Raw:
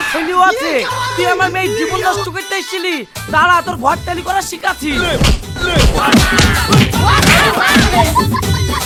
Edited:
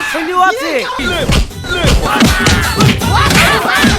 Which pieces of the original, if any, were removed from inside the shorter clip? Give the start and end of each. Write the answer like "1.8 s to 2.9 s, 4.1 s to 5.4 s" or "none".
1.0 s to 4.9 s